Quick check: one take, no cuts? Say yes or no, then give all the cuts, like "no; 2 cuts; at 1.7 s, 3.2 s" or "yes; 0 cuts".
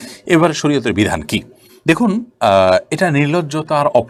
yes; 0 cuts